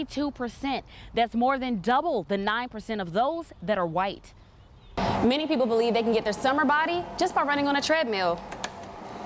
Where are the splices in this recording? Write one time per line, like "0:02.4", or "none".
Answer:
0:04.8